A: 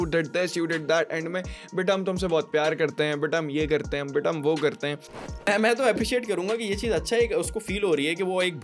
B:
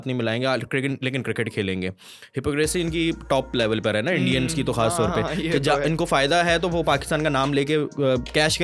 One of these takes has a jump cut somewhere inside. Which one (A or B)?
A